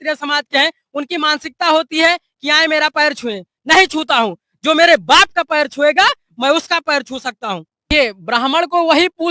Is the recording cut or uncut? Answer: cut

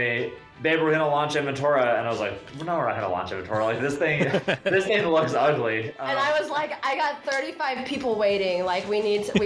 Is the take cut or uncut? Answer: cut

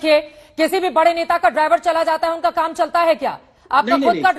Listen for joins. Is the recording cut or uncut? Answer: uncut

